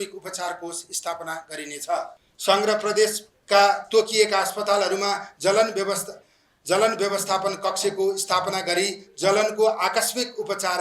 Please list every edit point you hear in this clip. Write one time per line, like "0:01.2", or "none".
0:02.2